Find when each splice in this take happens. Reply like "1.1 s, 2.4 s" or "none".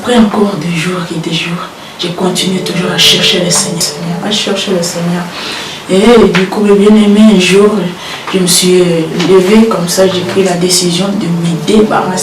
3.8 s